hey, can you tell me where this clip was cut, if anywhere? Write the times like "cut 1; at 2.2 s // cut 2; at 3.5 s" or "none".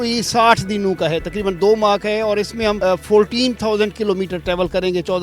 none